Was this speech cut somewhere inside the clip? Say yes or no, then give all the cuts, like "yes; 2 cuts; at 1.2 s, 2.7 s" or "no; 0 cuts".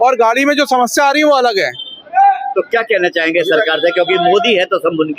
no; 0 cuts